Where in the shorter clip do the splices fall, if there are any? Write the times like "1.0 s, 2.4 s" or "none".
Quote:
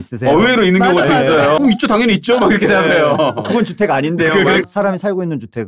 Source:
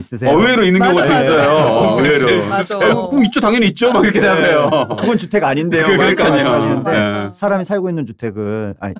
1.6 s, 4.6 s